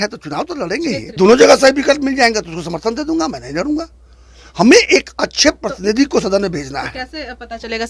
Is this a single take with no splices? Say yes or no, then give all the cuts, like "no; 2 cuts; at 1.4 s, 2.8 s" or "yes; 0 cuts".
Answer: no; 1 cut; at 1.2 s